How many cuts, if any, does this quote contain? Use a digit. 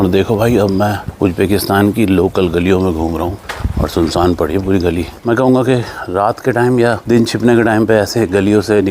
2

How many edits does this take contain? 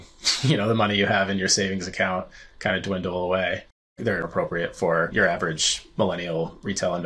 1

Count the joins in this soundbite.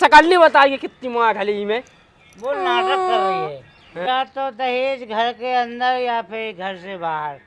1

